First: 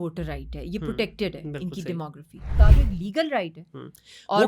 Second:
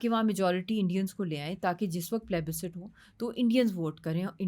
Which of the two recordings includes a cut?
first; 1 cut; at 2.6 s

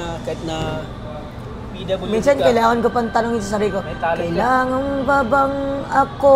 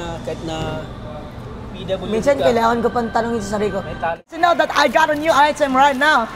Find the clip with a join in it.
second; 1 cut; at 4.3 s

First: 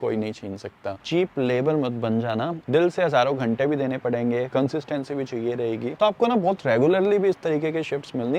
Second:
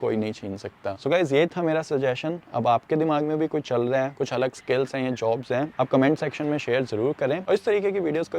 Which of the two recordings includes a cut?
first; 3 cuts; at 1.0 s, 2.6 s, 6.0 s

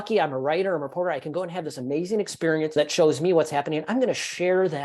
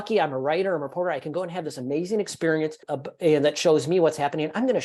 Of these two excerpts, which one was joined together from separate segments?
first; 1 cut; at 2.7 s

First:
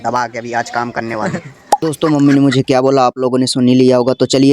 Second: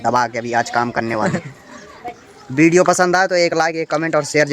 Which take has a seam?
first; 1 cut; at 1.9 s

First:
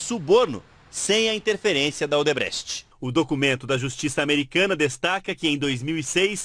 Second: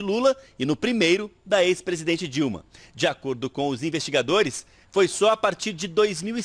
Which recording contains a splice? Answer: second; 1 cut; at 5.1 s

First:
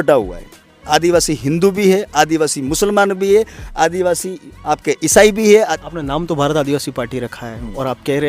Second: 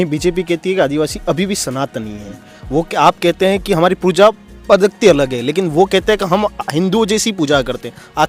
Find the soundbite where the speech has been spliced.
first; 1 cut; at 5.7 s

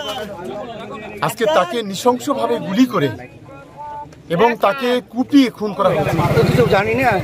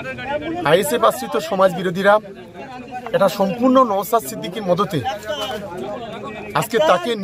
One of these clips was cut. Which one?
first; 1 cut; at 5.9 s

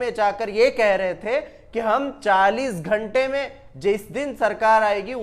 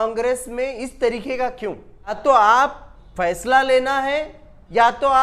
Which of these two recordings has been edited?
second; 1 cut; at 2.2 s

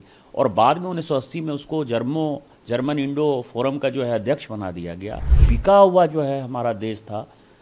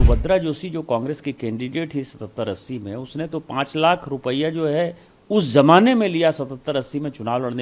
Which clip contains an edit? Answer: first; 1 cut; at 5.4 s

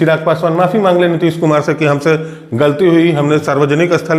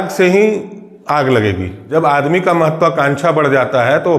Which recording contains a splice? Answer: second; 1 cut; at 1.7 s

